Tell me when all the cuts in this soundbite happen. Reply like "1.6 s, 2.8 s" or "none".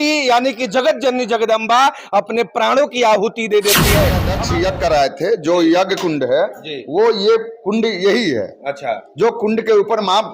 4.3 s